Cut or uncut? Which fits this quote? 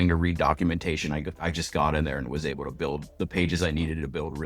cut